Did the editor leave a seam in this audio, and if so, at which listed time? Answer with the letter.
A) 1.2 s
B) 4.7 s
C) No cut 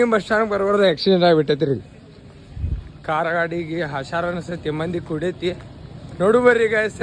C